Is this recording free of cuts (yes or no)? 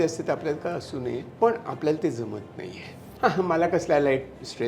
no